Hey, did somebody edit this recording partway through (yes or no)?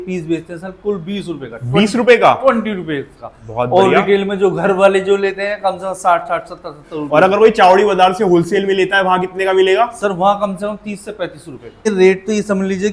yes